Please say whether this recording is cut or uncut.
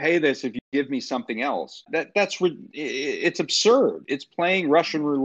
cut